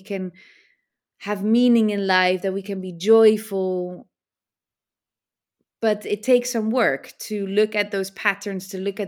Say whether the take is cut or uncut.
uncut